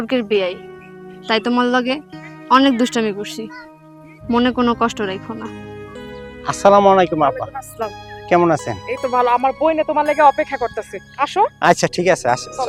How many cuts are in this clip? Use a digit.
0